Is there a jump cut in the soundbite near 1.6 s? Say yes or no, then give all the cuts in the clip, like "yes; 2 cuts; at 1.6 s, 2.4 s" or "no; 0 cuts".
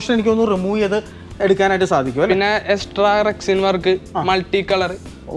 no; 0 cuts